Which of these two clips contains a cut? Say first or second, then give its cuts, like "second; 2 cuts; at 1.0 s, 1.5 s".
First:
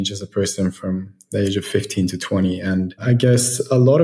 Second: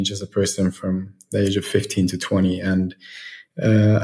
first; 1 cut; at 3.0 s